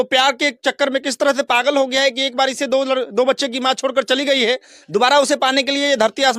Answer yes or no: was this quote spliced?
no